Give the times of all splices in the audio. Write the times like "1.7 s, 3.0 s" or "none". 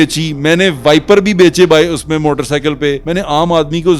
3.0 s